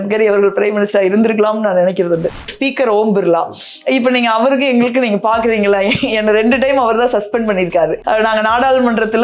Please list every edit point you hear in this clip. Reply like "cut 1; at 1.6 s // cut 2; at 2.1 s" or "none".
cut 1; at 2.5 s